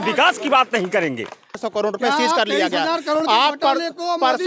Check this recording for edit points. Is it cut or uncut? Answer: cut